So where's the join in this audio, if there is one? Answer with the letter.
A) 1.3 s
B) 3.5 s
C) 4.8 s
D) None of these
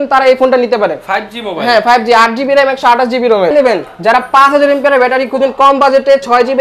B